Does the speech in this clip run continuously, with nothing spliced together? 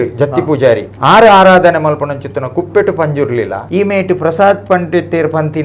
no; 2 cuts; at 0.9 s, 3.6 s

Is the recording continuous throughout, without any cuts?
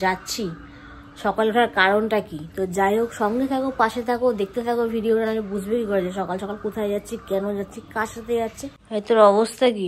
no; 1 cut; at 8.7 s

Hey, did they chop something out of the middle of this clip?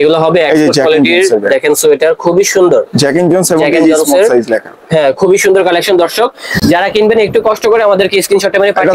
no; 0 cuts

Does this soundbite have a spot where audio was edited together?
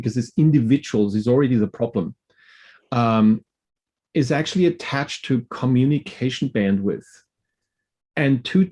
no; 0 cuts

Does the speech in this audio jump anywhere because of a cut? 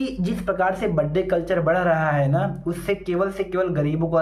no; 0 cuts

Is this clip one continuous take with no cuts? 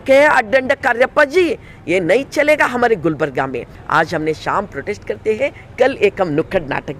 no; 1 cut; at 3.8 s

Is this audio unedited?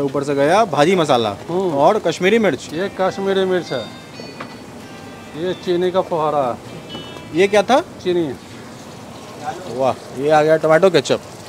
yes; 0 cuts

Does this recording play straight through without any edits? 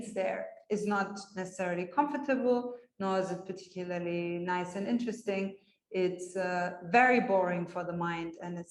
yes; 0 cuts

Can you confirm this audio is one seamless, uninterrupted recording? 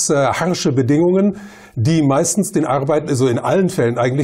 no; 1 cut; at 1.2 s

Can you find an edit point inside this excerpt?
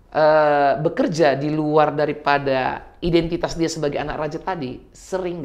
no; 0 cuts

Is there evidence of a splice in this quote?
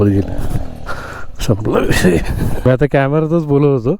yes; 1 cut; at 2.7 s

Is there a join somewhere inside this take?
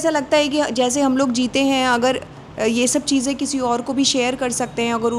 no; 0 cuts

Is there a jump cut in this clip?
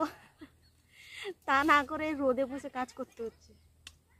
no; 0 cuts

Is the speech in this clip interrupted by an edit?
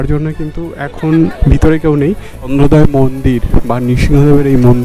yes; 1 cut; at 2.3 s

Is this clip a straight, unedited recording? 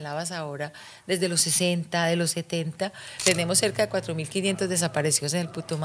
no; 1 cut; at 3.1 s

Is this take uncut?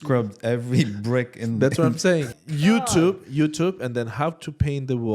no; 1 cut; at 2.3 s

